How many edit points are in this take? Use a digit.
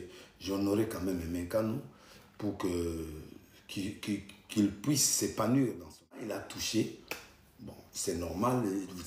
1